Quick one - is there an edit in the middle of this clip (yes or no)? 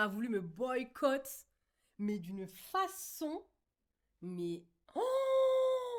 no